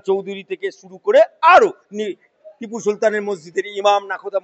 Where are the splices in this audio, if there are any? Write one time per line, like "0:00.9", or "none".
none